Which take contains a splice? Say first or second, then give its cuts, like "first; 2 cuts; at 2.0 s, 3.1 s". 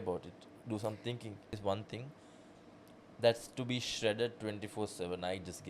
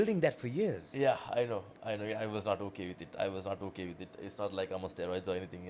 first; 1 cut; at 1.5 s